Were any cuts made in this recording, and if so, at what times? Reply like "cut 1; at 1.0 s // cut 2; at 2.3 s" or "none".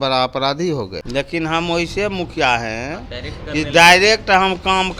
cut 1; at 1.0 s